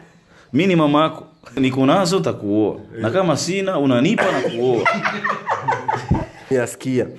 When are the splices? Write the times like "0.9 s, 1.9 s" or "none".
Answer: 1.6 s, 6.5 s